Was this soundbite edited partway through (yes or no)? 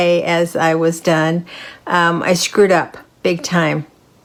no